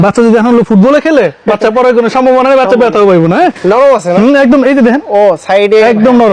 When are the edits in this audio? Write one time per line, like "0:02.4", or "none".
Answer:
none